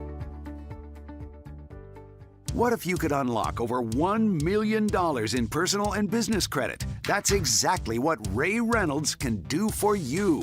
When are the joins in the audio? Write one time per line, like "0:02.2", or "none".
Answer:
0:02.4